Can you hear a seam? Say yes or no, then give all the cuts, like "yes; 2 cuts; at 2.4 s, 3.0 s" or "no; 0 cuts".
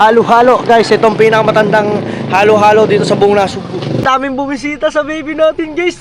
yes; 1 cut; at 4.0 s